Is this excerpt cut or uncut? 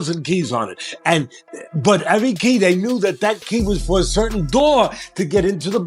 uncut